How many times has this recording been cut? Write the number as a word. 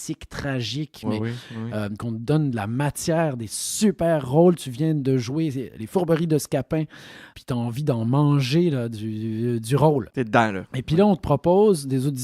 four